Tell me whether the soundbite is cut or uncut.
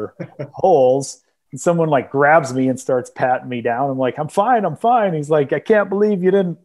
uncut